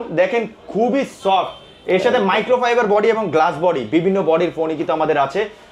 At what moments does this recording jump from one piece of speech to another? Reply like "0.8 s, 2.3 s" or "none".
none